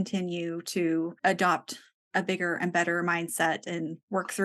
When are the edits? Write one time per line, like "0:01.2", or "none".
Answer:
0:01.2